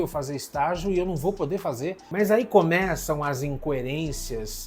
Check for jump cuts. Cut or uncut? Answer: cut